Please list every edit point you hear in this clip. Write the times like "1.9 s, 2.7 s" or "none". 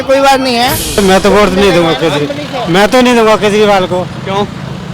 1.0 s